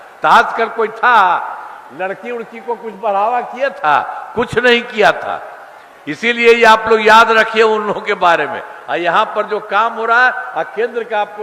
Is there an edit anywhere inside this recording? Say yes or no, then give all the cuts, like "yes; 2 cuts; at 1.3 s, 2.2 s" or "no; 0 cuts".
no; 0 cuts